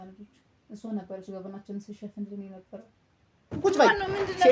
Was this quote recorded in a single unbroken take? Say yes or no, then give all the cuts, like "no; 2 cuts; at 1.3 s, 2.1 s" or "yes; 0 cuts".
no; 1 cut; at 3.4 s